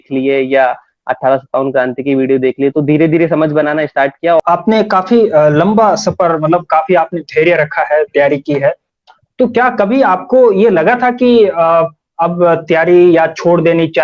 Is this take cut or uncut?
cut